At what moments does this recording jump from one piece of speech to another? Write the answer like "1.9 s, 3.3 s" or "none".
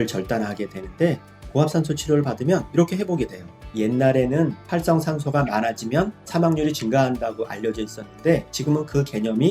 3.6 s